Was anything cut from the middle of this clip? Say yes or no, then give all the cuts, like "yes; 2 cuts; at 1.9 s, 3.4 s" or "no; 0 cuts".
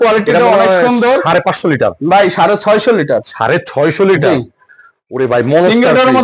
no; 0 cuts